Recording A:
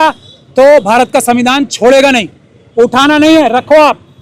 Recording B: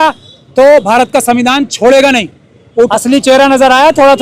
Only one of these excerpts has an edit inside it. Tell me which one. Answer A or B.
B